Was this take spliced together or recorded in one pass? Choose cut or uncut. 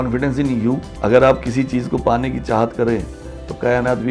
cut